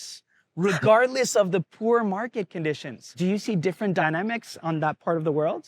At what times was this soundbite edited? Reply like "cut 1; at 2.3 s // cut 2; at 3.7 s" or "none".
cut 1; at 3.1 s